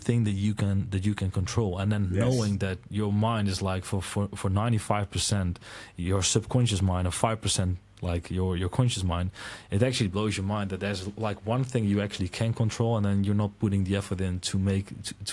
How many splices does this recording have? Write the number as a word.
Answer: zero